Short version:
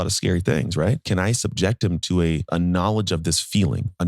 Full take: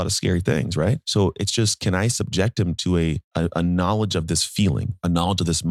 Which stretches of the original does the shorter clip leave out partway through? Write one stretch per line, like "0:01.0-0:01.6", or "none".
0:01.0-0:01.8
0:03.2-0:03.5